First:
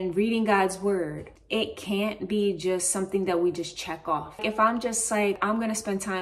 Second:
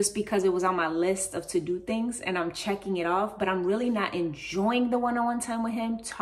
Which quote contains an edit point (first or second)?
first